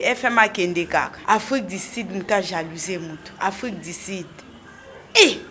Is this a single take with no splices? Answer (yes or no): no